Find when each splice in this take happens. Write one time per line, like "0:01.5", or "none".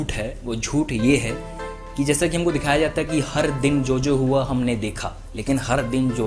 none

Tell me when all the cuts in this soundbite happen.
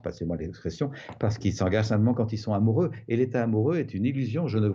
none

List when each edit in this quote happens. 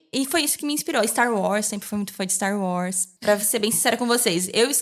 0:03.1

